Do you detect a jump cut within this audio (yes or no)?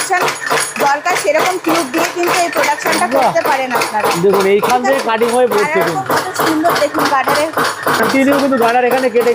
no